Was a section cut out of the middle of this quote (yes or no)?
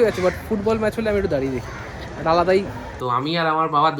yes